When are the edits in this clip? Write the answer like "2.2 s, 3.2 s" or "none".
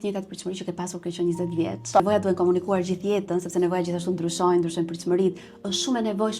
2.0 s